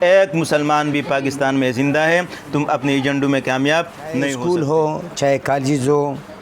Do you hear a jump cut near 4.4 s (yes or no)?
yes